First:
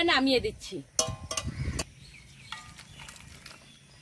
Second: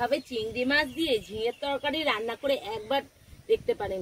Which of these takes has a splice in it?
first; 1 cut; at 1.8 s

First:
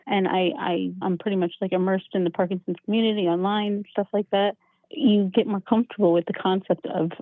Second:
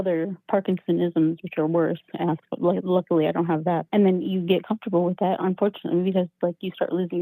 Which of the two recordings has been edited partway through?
first; 1 cut; at 1.0 s

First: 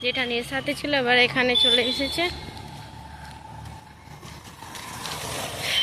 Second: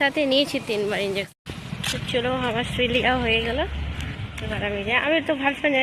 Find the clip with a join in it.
second; 1 cut; at 1.3 s

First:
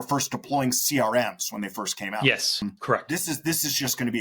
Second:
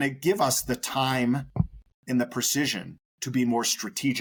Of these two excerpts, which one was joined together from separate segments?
first; 1 cut; at 2.6 s

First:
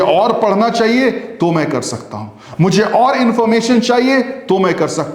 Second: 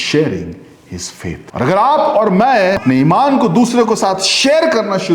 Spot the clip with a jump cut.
second; 2 cuts; at 1.4 s, 2.8 s

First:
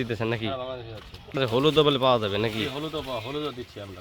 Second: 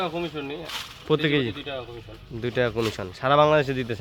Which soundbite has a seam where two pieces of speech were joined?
first; 1 cut; at 1.4 s

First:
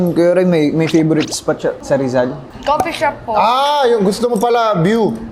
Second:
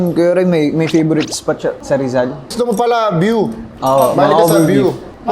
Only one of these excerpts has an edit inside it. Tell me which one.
second; 1 cut; at 2.5 s

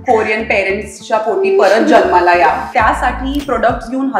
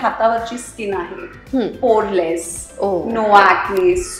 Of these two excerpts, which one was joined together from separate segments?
first; 1 cut; at 2.7 s

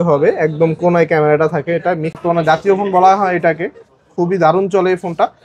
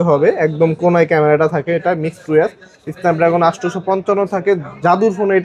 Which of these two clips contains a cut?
first; 1 cut; at 2.2 s

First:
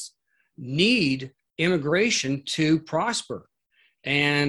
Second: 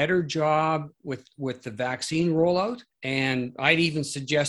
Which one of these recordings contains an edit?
second; 1 cut; at 2.9 s

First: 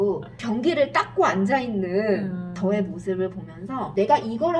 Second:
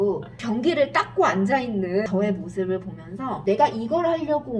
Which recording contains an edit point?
second; 1 cut; at 2.1 s

